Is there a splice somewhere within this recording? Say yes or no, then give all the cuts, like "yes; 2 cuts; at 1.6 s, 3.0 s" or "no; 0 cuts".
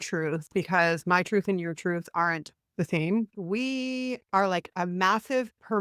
yes; 1 cut; at 3.3 s